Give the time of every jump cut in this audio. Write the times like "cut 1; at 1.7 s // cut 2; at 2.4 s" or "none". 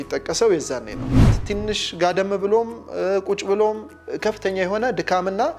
cut 1; at 1.3 s